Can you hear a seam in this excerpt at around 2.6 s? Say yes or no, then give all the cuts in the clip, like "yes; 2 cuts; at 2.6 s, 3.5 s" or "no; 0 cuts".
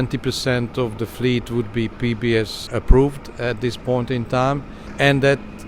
yes; 1 cut; at 2.6 s